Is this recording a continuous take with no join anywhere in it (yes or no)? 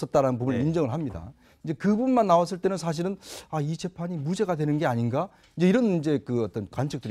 no